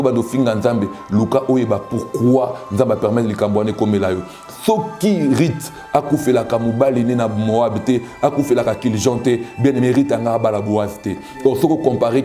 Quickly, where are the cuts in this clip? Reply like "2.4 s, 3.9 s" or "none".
none